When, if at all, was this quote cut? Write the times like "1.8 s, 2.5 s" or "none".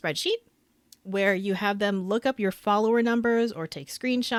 none